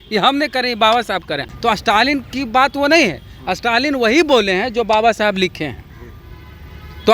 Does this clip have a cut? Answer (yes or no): yes